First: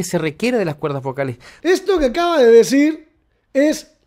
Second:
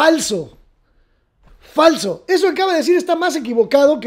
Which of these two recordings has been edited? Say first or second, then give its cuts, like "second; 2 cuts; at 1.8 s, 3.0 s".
first; 1 cut; at 1.5 s